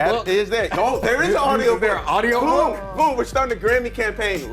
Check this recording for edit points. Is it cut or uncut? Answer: uncut